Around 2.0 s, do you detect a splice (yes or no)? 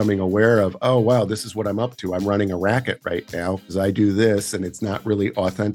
no